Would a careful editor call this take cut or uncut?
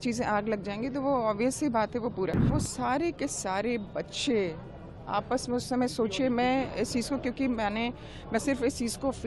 cut